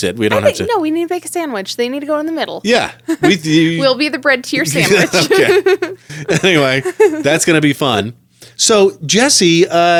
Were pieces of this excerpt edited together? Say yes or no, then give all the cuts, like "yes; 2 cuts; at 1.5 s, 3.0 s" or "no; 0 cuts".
no; 0 cuts